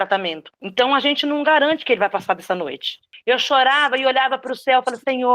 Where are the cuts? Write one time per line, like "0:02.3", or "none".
0:03.1